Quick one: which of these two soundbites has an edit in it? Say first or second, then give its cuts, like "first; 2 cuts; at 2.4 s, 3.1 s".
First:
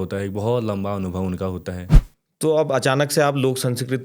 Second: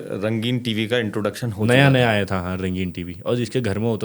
first; 1 cut; at 1.9 s